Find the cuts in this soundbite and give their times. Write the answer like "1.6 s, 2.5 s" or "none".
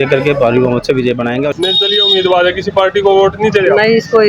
1.5 s